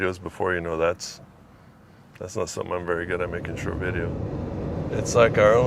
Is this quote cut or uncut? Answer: cut